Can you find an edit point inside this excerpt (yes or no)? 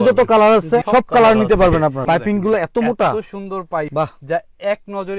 yes